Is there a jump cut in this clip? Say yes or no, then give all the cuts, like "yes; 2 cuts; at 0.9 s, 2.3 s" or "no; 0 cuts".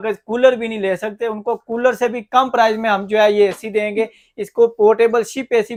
no; 0 cuts